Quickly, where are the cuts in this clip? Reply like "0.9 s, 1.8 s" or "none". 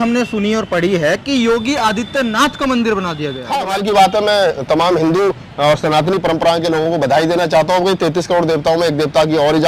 3.5 s